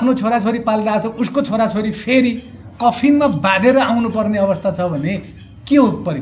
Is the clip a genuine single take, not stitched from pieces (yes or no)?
yes